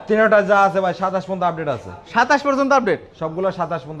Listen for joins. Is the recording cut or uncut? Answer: uncut